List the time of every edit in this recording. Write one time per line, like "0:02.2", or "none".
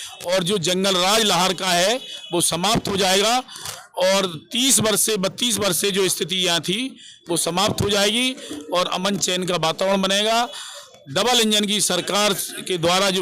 none